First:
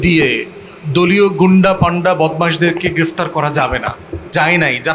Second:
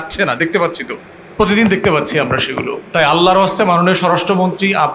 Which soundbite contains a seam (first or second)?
second